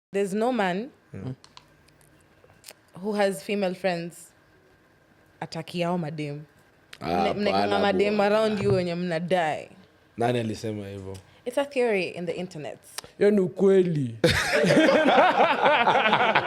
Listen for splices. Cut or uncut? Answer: uncut